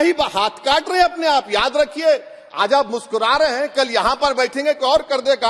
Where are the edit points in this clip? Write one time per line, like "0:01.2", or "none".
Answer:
none

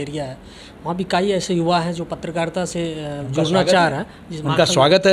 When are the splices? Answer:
none

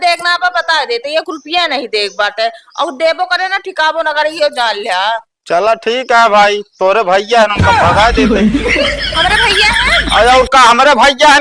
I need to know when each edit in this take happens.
none

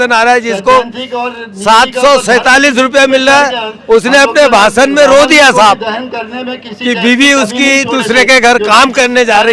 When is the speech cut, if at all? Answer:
none

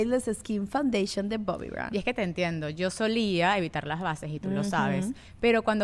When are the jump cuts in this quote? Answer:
none

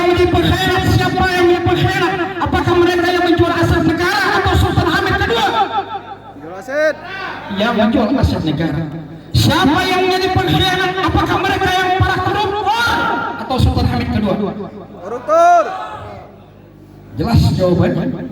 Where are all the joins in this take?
none

